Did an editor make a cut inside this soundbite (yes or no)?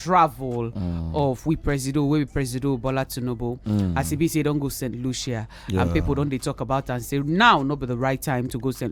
no